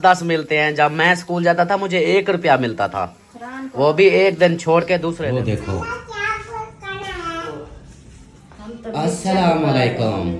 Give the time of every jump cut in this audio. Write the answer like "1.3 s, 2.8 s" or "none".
5.2 s